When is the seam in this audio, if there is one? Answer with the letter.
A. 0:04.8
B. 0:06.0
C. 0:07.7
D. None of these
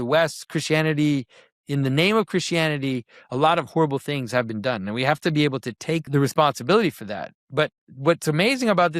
B